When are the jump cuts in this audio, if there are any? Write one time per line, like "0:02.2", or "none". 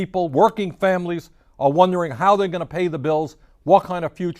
none